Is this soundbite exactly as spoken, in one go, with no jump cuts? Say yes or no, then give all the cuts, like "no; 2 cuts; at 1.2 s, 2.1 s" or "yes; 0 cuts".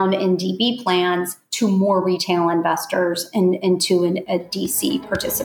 yes; 0 cuts